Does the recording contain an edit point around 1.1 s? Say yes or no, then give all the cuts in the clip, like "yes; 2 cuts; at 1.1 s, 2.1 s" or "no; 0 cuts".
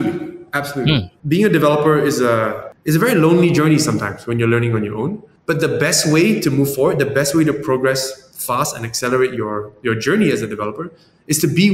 yes; 1 cut; at 1.1 s